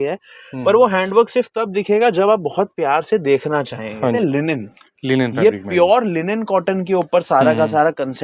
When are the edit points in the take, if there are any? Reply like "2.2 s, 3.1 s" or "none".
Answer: 4.2 s